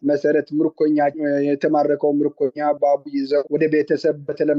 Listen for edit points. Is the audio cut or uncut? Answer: uncut